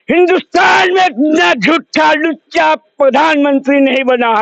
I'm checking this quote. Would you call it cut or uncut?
uncut